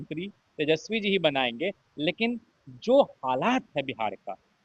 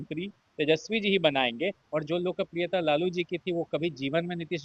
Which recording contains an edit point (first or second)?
second